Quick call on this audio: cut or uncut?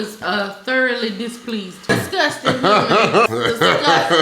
cut